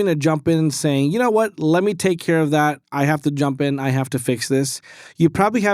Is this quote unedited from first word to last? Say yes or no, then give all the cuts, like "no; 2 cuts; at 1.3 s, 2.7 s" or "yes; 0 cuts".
yes; 0 cuts